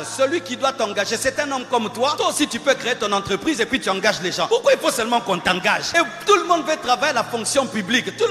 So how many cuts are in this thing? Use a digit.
3